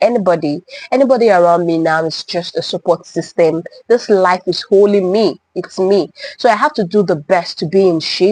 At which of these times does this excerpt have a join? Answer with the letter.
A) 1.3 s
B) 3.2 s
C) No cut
C